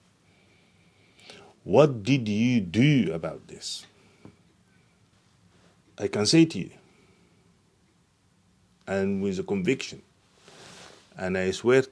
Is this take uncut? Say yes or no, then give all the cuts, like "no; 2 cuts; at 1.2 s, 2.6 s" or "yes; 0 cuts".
no; 1 cut; at 5.2 s